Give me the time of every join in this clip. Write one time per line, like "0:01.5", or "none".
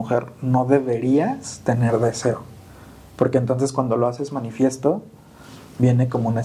none